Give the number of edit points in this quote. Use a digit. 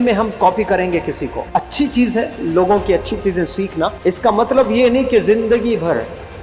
2